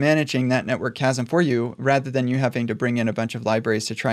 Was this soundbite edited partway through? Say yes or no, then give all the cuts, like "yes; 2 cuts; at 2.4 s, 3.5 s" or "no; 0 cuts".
no; 0 cuts